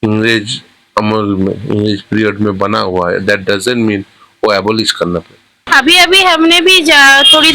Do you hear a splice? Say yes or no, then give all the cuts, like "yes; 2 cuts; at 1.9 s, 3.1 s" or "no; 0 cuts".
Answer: yes; 1 cut; at 5.6 s